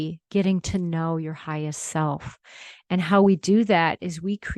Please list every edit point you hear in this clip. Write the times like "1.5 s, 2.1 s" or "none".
none